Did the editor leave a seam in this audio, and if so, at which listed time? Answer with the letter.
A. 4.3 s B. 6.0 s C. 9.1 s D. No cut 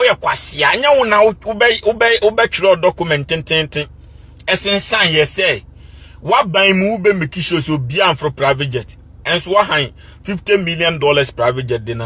C